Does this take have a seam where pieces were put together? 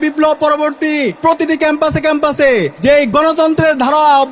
yes; 2 cuts; at 1.2 s, 3.1 s

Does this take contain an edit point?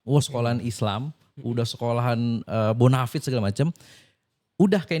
no; 0 cuts

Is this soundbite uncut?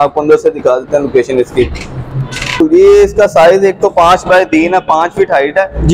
no; 1 cut; at 2.6 s

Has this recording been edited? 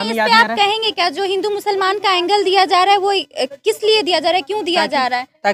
no; 0 cuts

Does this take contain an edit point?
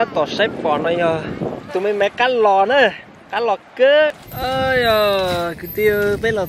yes; 2 cuts; at 1.6 s, 4.3 s

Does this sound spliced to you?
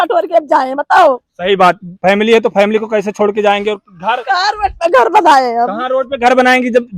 no; 0 cuts

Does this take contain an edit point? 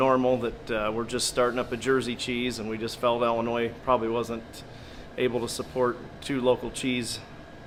no; 0 cuts

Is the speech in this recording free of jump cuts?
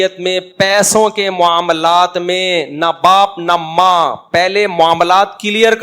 yes; 0 cuts

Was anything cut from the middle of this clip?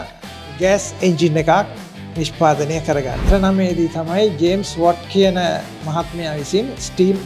yes; 1 cut; at 3.2 s

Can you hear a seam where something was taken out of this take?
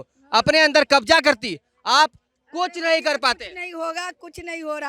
no; 0 cuts

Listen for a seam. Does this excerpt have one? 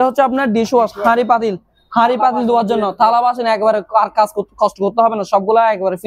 no; 0 cuts

